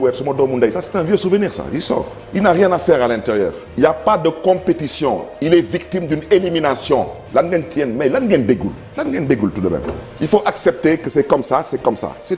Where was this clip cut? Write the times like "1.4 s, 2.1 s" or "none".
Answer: none